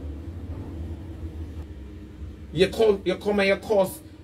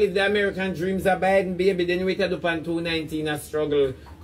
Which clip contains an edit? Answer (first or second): first